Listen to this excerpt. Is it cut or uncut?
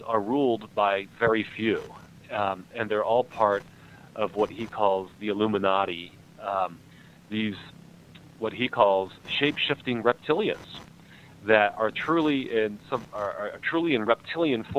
uncut